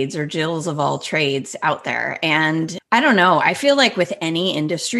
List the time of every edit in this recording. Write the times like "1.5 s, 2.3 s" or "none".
2.8 s